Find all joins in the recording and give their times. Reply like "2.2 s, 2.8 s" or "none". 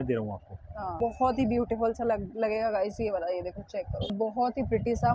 1.0 s, 4.1 s